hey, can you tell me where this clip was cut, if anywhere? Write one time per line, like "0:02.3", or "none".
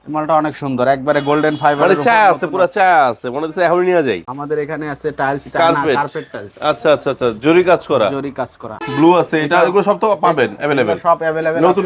0:04.3
0:08.7